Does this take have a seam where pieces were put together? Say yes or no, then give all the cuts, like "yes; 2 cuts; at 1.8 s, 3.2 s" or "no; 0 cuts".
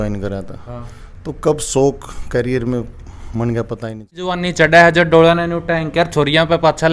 yes; 1 cut; at 4.4 s